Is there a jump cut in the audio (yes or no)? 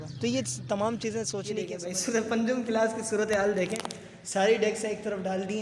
yes